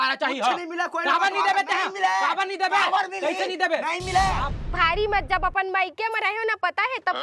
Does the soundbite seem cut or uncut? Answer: cut